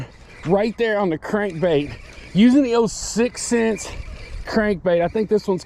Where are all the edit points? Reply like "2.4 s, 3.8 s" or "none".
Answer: none